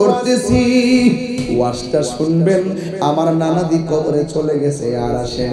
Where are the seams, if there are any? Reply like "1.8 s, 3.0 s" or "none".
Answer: 1.4 s